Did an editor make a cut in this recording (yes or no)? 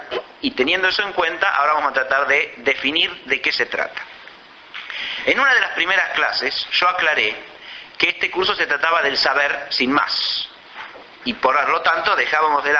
yes